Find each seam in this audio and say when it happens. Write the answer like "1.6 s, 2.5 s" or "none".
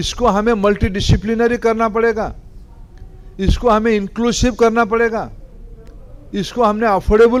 none